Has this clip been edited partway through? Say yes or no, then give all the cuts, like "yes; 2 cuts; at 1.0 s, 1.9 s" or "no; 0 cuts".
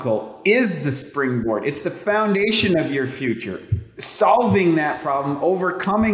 no; 0 cuts